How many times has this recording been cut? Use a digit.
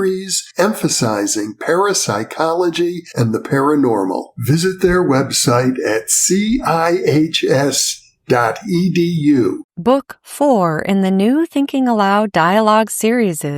1